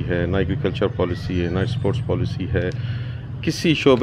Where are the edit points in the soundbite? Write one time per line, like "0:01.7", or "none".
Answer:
none